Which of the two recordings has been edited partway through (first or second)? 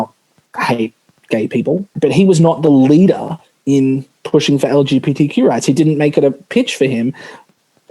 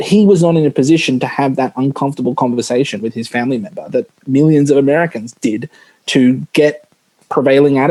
first